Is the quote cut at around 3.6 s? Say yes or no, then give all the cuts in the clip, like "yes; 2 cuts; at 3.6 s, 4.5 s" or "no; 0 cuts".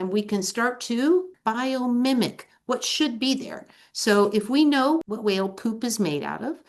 no; 2 cuts; at 1.3 s, 5.0 s